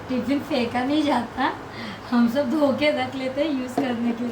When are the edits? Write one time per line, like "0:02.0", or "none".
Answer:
none